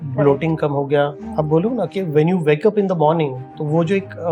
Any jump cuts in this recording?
yes; 1 cut; at 1.2 s

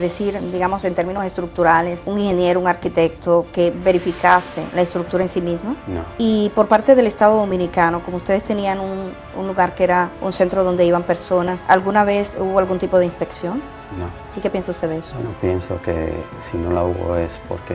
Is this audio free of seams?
yes; 0 cuts

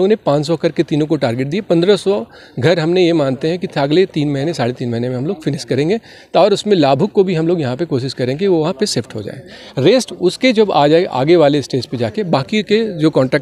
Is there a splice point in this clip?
no; 0 cuts

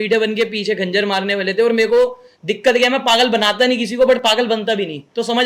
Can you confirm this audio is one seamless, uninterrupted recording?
yes; 0 cuts

